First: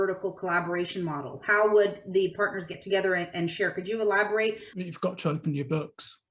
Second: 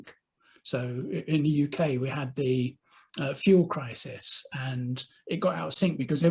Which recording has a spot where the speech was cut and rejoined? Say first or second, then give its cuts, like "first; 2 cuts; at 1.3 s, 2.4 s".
first; 1 cut; at 4.7 s